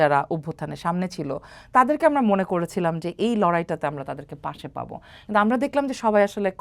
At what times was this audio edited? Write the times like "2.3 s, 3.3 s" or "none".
none